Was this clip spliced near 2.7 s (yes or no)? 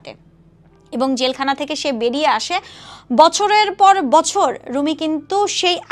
no